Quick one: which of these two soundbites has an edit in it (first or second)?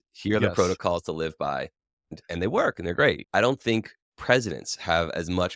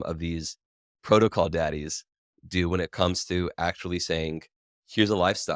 first